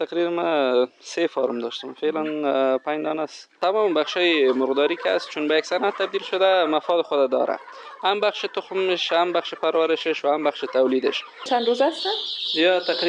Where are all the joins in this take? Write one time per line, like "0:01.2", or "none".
0:03.6
0:11.5